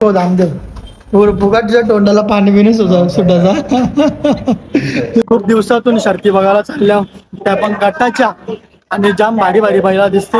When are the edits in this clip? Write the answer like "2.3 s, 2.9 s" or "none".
5.2 s